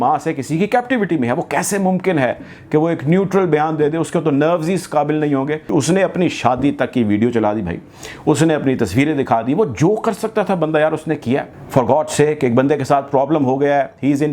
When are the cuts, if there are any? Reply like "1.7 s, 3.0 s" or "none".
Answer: 5.6 s, 11.6 s